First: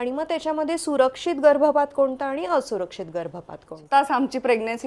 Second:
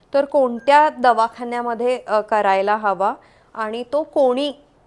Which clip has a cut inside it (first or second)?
first